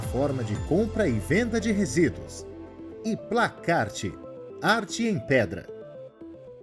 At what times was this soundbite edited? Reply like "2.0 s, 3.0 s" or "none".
5.6 s